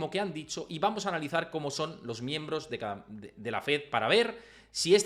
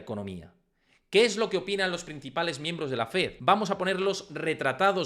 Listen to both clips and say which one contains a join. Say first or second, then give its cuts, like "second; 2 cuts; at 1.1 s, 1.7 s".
second; 1 cut; at 3.4 s